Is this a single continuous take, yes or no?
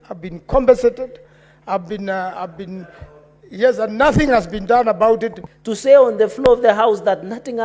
no